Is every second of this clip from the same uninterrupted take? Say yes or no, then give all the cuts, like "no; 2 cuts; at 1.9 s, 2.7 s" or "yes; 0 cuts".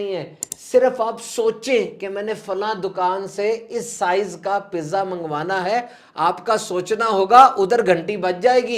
yes; 0 cuts